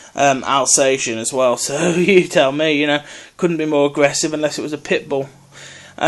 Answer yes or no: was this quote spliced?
no